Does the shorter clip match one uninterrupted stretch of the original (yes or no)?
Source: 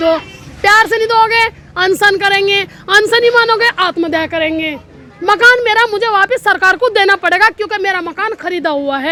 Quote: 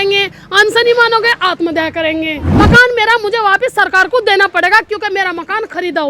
no